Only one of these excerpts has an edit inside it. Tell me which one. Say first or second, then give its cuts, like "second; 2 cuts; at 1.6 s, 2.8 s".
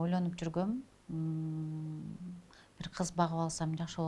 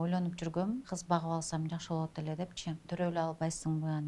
second; 2 cuts; at 0.9 s, 2.9 s